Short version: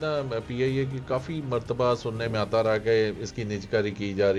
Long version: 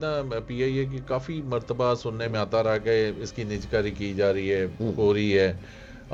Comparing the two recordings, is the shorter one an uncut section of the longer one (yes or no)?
yes